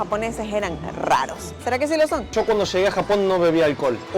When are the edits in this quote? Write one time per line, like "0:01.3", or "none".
0:02.3